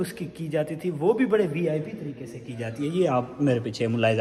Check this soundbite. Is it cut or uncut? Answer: uncut